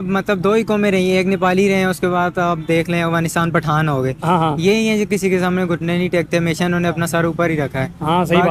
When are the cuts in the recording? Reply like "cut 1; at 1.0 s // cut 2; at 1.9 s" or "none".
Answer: none